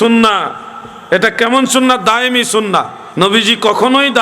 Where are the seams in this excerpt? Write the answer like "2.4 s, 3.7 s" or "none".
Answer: 3.0 s